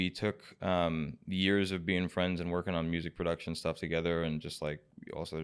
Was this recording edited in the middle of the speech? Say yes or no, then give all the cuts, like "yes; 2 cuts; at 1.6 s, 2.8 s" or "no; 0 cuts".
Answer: no; 0 cuts